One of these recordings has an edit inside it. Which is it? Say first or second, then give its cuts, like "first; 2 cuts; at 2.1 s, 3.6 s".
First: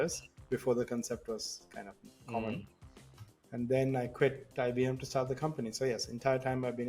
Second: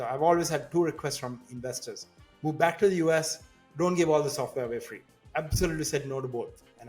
second; 1 cut; at 5.2 s